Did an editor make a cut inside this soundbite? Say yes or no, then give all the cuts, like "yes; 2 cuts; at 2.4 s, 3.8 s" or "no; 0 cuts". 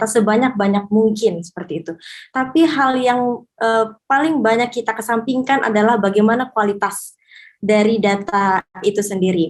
no; 0 cuts